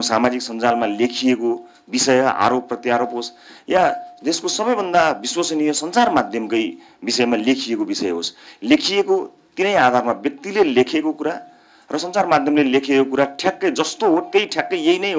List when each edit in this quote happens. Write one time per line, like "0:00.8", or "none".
none